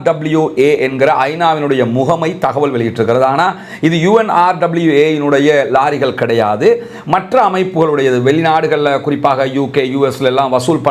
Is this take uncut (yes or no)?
yes